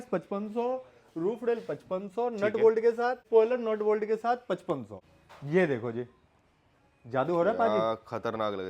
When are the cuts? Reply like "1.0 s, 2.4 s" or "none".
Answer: 3.2 s, 4.9 s